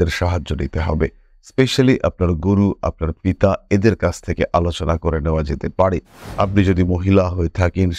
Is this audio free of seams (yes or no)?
no